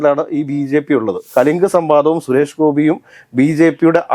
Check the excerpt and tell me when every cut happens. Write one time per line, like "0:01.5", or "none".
0:01.2